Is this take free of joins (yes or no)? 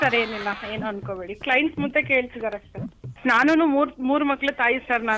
no